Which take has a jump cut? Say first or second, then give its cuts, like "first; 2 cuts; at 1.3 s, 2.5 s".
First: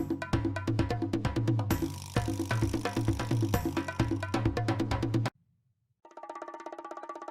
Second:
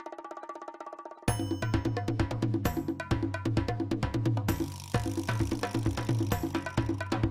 first; 1 cut; at 5.3 s